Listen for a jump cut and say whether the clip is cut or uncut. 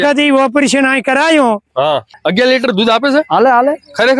cut